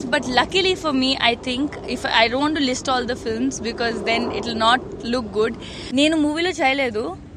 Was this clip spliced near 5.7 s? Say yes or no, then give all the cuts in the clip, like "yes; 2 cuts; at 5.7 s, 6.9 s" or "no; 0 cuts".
yes; 1 cut; at 5.7 s